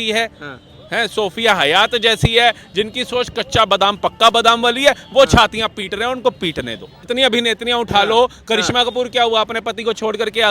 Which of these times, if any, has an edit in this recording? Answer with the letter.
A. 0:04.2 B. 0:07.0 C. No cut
B